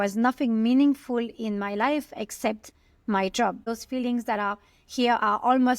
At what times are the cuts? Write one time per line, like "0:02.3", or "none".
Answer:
0:03.7